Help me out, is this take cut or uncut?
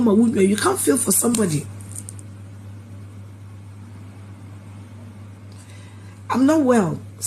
uncut